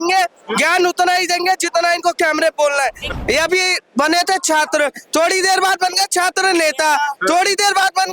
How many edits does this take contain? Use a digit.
1